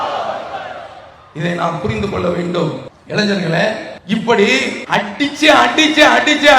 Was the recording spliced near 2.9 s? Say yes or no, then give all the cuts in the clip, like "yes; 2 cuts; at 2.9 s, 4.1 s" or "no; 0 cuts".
yes; 3 cuts; at 2.9 s, 3.9 s, 4.8 s